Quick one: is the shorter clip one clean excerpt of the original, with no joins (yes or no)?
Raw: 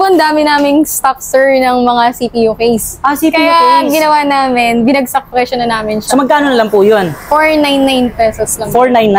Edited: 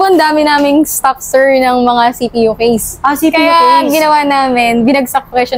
yes